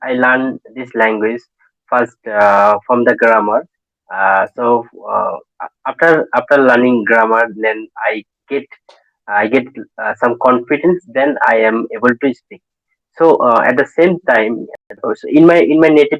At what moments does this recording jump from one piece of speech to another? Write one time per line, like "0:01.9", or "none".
0:15.1

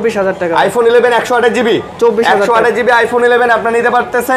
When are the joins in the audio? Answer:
none

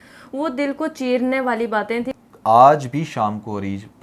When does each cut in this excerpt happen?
0:02.1

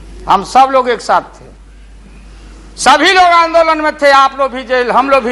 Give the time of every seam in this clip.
none

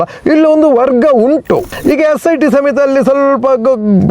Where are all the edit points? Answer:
0:01.7

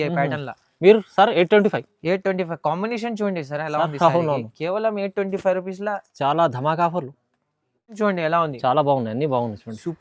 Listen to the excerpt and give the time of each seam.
0:07.9

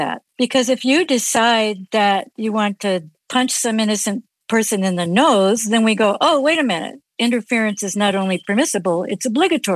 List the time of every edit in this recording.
none

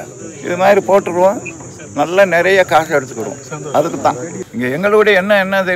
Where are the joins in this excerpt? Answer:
0:04.4

